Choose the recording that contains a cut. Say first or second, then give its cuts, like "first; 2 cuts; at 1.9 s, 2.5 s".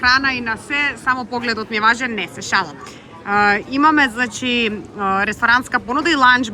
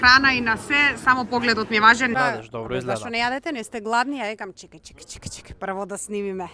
second; 1 cut; at 2.2 s